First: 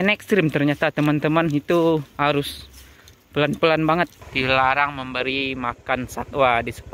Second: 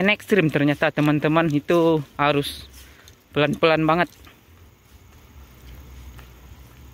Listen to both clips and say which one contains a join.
first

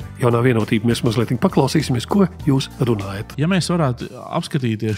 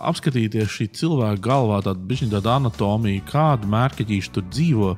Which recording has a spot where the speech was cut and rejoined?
first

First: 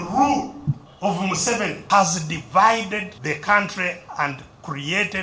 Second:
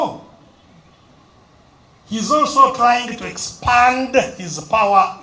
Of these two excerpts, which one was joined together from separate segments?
first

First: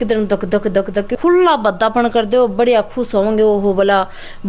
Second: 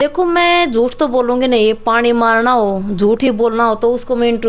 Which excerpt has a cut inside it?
first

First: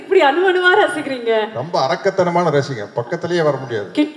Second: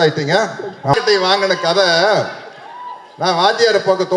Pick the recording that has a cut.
second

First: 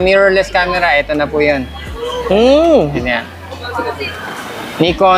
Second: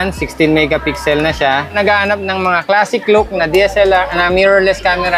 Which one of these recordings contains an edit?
second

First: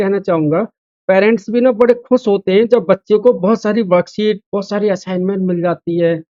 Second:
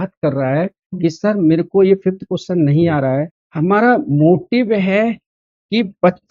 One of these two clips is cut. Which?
second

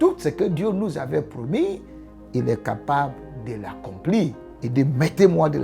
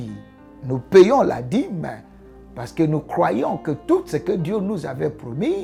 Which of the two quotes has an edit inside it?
first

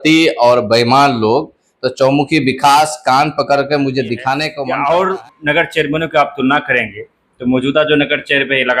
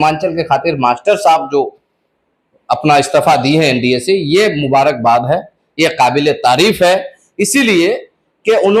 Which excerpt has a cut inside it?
first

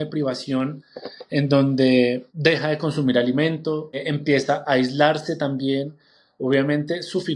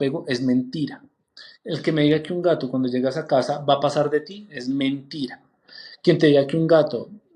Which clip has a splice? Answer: first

